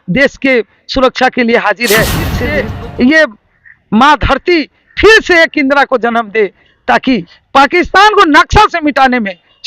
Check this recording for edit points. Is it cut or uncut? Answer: cut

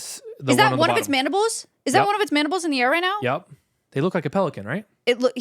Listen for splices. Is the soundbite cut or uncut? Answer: cut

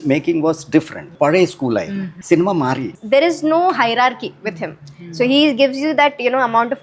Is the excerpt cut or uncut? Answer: cut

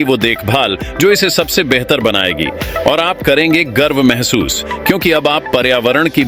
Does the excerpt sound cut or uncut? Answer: uncut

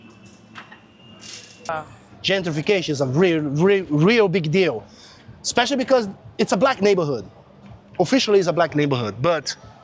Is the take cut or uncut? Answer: cut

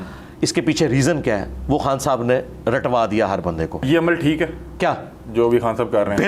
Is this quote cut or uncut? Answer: cut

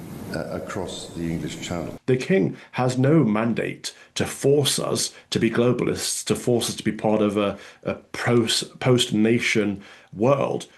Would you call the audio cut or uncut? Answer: cut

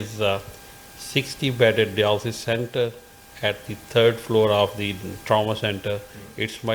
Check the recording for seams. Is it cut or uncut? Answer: uncut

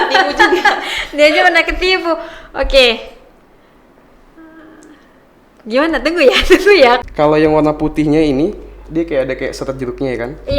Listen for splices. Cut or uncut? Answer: cut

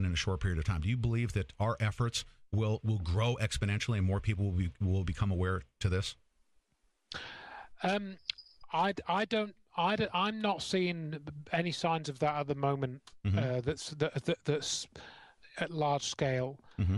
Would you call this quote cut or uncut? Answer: uncut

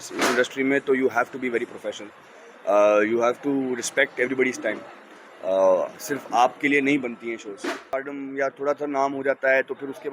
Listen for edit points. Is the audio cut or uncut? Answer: cut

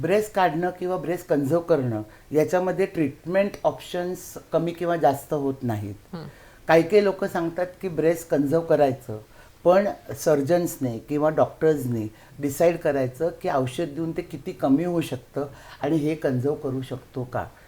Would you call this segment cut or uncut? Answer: uncut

